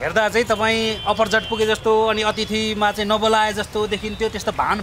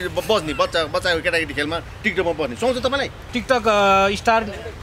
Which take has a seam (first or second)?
second